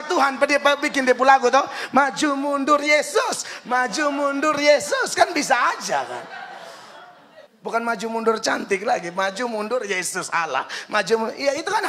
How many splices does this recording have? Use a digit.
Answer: 1